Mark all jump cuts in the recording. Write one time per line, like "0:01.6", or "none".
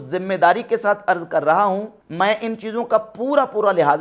0:02.0